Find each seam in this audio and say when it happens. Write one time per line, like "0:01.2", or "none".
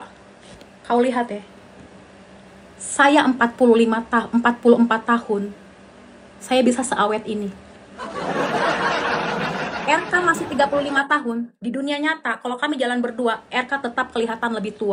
none